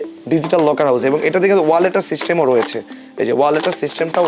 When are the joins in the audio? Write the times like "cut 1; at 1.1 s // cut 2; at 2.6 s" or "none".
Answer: none

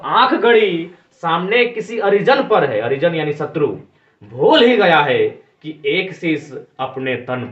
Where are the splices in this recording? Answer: none

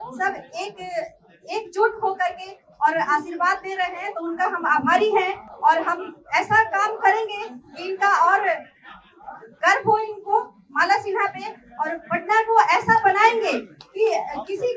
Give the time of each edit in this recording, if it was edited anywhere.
none

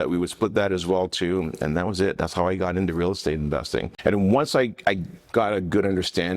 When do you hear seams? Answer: cut 1; at 3.9 s

